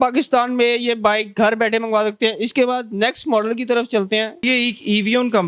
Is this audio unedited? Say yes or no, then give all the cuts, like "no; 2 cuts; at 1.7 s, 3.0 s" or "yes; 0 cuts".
yes; 0 cuts